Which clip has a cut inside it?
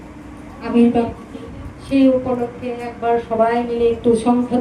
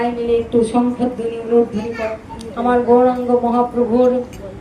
second; 1 cut; at 2.3 s

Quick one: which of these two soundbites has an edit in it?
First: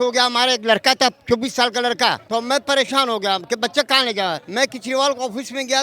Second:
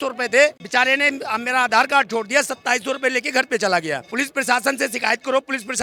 first; 2 cuts; at 2.2 s, 4.4 s

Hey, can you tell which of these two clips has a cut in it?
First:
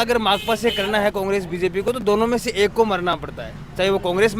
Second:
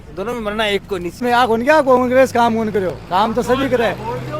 second; 1 cut; at 1.2 s

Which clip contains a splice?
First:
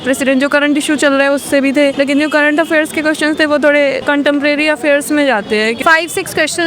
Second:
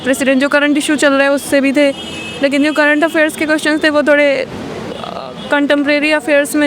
first; 3 cuts; at 1.9 s, 4.0 s, 5.8 s

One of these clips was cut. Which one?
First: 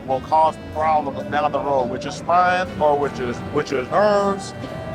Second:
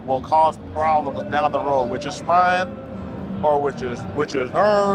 first; 1 cut; at 2.7 s

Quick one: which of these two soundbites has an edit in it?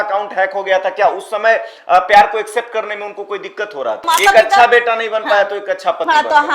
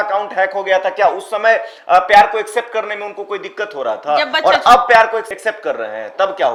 first; 1 cut; at 4.0 s

